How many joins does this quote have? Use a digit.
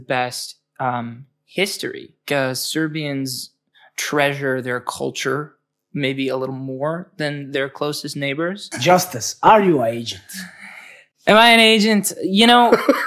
2